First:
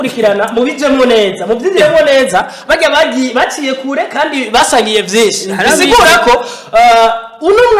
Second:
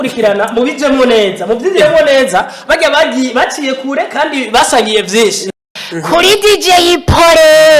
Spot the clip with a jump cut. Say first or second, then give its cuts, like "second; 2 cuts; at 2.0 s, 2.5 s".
second; 1 cut; at 5.6 s